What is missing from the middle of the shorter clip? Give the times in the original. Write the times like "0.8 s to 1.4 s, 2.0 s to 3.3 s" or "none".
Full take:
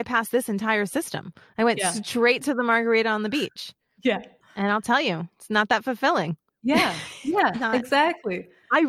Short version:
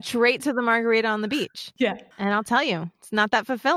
3.9 s to 4.3 s